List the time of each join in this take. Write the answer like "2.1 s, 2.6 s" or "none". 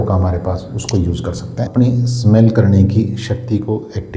1.5 s